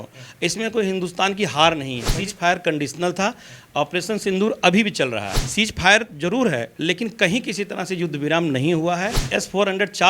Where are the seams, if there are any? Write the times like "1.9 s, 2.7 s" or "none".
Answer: 2.2 s, 5.4 s, 9.2 s